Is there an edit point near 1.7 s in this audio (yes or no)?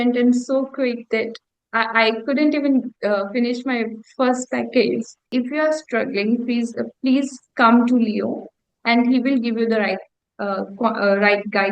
no